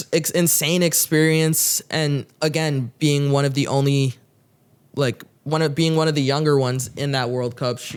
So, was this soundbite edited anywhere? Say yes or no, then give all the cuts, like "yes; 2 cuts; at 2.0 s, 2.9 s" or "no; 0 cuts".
no; 0 cuts